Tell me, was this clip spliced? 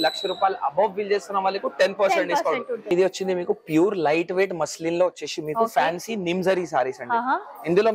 yes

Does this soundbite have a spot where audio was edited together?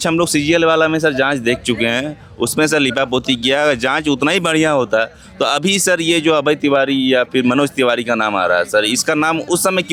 no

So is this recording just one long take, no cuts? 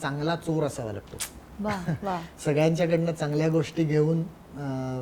yes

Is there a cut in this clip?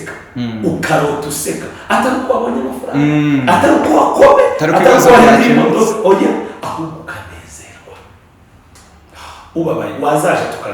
yes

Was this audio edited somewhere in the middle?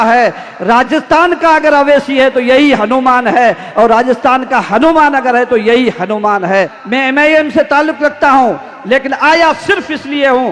yes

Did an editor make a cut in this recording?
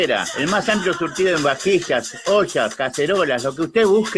no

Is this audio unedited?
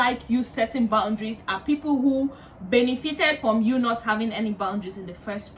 yes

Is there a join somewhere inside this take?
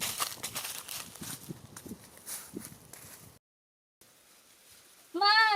yes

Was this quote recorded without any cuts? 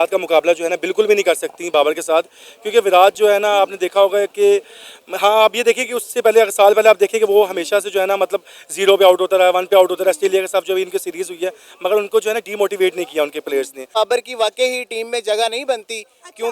no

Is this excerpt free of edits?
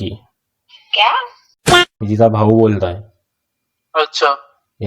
no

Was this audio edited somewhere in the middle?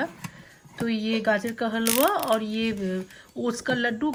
no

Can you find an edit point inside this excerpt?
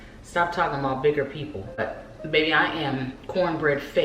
yes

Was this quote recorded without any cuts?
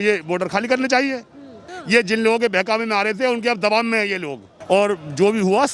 no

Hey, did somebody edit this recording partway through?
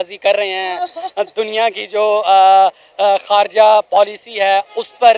no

